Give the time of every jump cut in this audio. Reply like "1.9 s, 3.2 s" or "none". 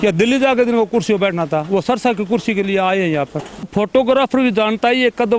3.7 s